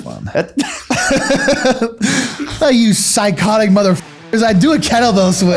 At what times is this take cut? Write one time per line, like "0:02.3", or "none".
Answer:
none